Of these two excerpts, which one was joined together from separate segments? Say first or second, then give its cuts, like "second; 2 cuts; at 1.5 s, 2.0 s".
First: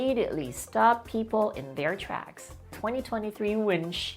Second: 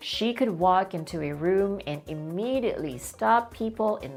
first; 1 cut; at 2.7 s